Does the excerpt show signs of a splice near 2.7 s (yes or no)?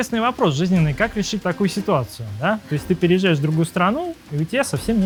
no